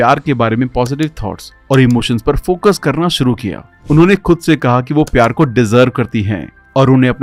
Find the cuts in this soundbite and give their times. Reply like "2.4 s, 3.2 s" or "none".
none